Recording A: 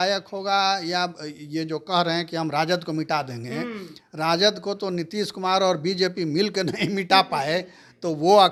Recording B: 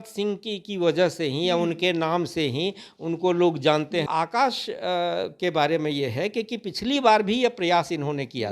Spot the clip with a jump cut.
B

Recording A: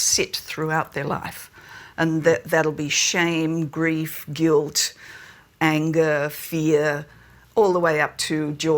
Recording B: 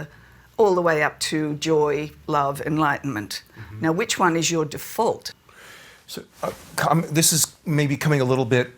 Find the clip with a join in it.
B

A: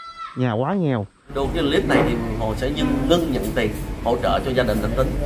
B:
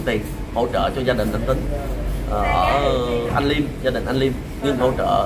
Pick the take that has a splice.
A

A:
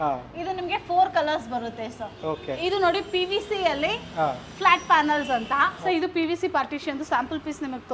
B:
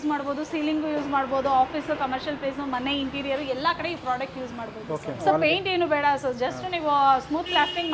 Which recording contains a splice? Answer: A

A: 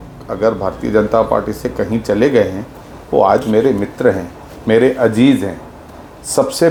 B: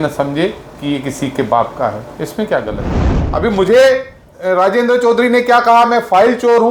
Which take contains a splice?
B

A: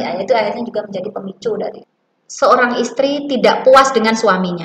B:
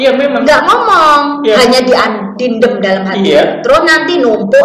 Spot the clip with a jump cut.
A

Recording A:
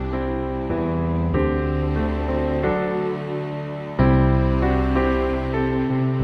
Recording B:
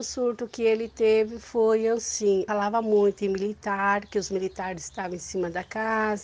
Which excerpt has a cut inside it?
B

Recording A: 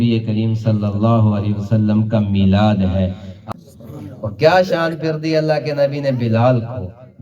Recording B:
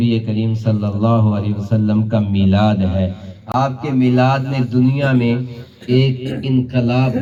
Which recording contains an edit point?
A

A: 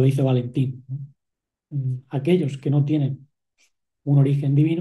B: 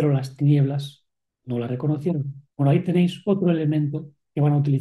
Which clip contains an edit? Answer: B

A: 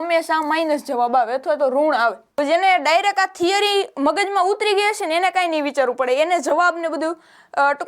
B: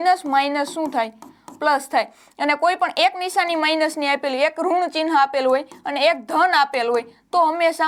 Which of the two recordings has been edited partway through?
A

